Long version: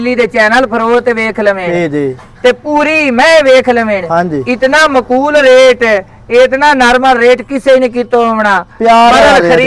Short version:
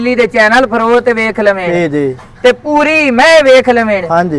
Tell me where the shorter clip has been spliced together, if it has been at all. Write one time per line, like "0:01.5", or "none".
none